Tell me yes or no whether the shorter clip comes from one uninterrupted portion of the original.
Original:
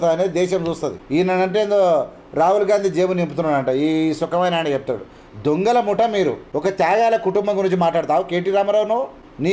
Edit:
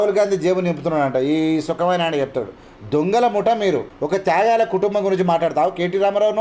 yes